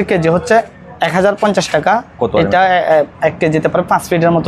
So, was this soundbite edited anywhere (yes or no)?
no